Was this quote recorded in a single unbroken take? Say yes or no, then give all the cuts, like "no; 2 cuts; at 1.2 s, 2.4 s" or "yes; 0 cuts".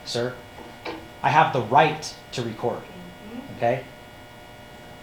yes; 0 cuts